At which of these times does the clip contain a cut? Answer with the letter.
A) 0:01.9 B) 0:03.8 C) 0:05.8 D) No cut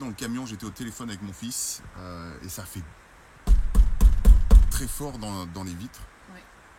D